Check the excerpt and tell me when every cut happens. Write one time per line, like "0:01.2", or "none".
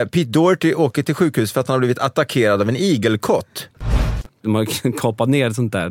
0:03.9